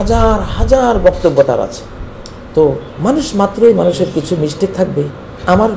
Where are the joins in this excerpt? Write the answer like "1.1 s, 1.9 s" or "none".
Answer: 2.9 s

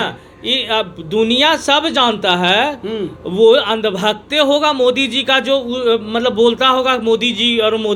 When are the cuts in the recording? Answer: none

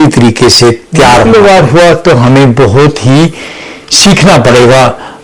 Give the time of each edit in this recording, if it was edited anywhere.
1.2 s

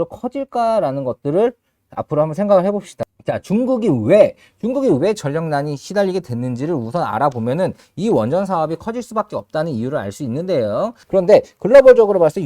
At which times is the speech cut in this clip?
3.0 s, 11.0 s

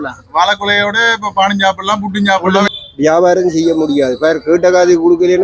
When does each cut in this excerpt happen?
2.7 s

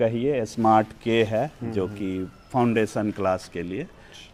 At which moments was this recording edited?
none

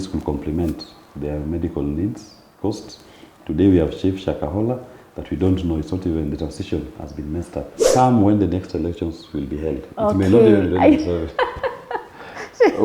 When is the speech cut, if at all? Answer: 7.8 s

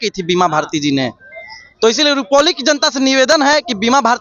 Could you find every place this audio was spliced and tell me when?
none

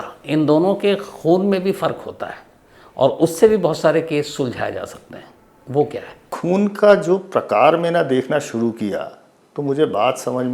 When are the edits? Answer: 6.3 s

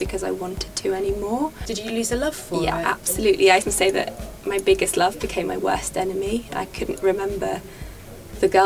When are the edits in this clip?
1.6 s, 3.6 s

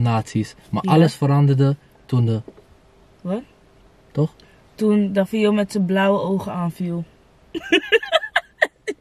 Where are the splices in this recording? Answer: none

